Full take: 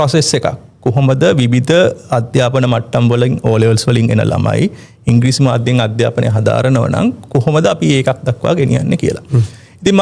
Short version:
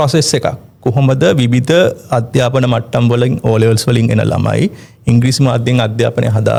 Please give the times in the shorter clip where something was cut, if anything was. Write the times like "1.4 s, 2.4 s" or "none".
none